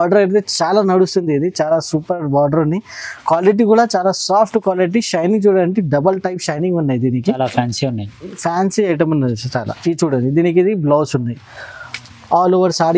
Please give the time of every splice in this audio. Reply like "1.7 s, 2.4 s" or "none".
7.4 s